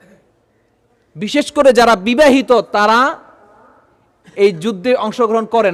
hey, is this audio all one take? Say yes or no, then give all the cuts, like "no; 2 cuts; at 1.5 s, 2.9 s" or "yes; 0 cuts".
yes; 0 cuts